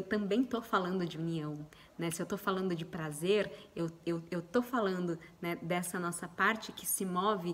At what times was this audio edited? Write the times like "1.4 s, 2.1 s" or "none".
none